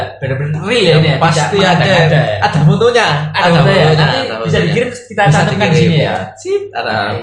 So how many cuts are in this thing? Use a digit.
0